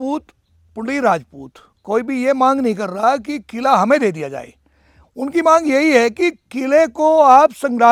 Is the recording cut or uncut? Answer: uncut